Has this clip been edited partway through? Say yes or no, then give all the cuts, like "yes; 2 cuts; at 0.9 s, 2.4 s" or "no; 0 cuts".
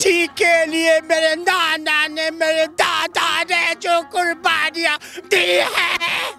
no; 0 cuts